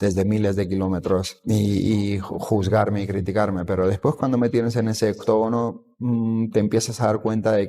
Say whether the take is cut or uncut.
cut